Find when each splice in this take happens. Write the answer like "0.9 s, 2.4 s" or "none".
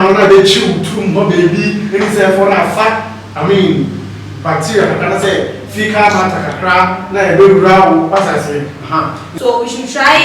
9.2 s